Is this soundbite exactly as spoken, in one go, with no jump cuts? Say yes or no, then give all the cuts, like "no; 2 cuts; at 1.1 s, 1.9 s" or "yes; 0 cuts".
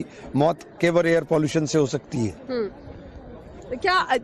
no; 1 cut; at 2.1 s